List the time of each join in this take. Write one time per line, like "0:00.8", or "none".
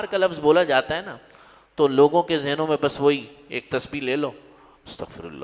none